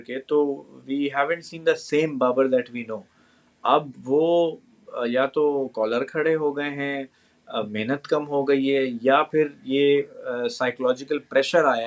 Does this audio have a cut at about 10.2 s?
no; 0 cuts

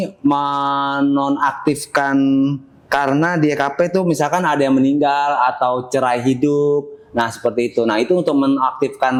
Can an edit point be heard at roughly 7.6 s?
no; 0 cuts

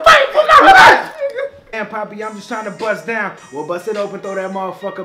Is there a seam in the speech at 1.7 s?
yes; 1 cut; at 1.7 s

